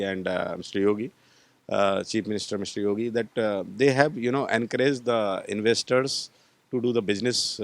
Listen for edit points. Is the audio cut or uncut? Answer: uncut